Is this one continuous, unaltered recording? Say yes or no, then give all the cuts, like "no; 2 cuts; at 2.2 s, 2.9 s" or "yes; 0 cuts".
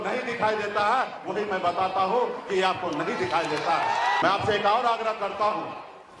no; 1 cut; at 4.2 s